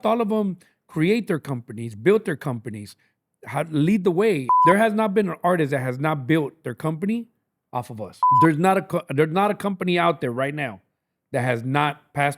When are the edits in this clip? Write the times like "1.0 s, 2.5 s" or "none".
4.5 s, 8.2 s